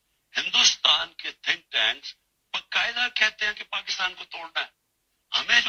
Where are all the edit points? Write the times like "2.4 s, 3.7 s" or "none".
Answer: none